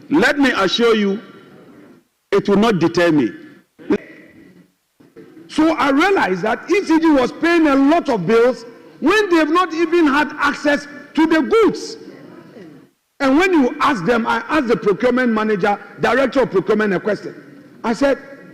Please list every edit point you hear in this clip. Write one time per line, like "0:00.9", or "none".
0:04.0